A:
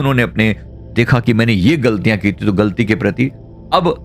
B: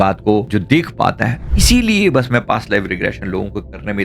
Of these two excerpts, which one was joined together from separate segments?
B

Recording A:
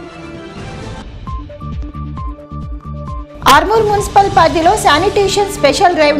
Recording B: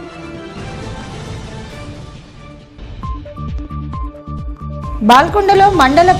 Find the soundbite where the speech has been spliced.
B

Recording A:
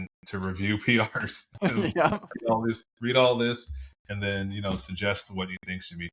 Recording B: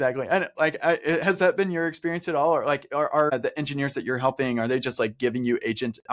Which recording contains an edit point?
B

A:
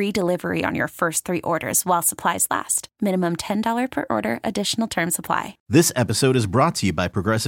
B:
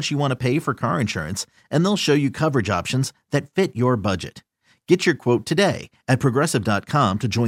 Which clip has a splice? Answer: A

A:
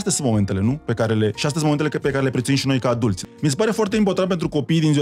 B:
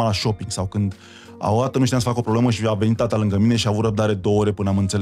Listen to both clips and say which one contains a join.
A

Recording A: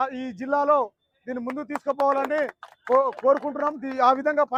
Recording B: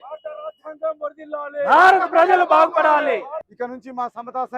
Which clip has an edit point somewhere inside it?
B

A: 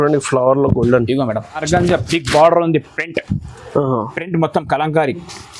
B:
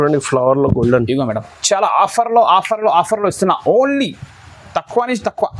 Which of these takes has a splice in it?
A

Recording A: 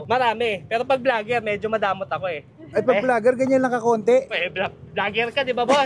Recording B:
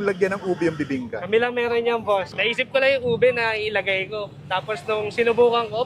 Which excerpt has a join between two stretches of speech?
B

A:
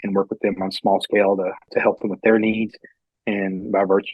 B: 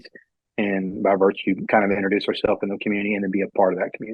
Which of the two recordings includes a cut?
A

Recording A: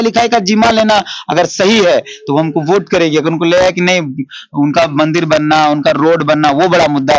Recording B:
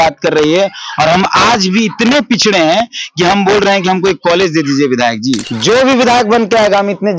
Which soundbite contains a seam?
B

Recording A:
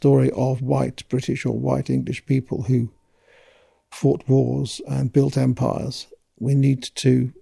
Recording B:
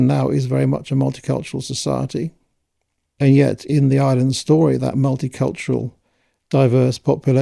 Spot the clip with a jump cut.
A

